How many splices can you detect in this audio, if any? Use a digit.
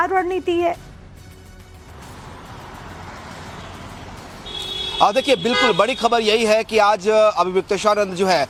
0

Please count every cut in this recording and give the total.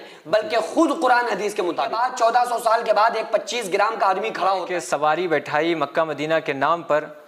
2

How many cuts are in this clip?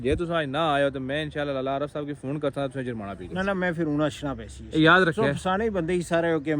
0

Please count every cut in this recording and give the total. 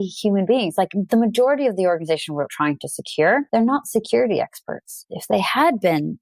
2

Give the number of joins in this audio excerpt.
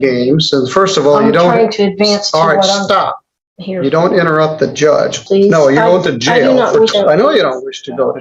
2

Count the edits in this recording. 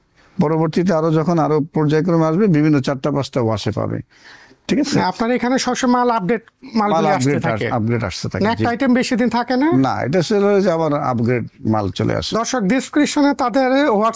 0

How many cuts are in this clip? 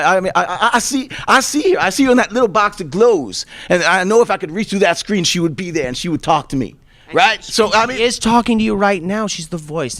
1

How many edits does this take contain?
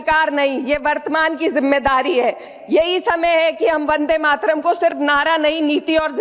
1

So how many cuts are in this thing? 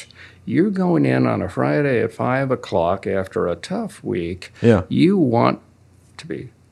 0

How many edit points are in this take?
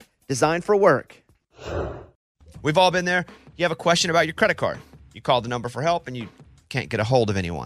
1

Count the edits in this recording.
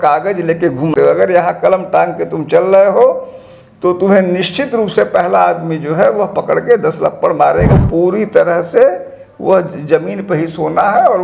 2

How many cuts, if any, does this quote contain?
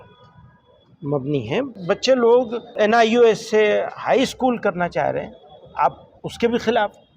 2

